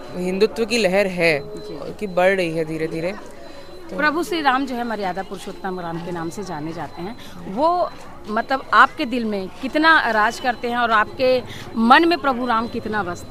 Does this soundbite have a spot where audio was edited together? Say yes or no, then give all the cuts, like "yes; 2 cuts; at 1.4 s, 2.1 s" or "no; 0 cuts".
no; 0 cuts